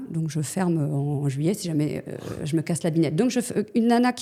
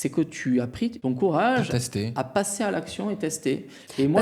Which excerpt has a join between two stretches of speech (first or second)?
second